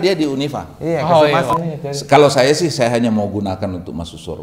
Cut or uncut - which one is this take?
cut